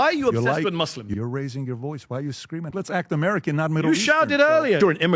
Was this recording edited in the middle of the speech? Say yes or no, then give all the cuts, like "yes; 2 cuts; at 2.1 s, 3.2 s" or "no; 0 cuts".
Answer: yes; 2 cuts; at 1.1 s, 2.7 s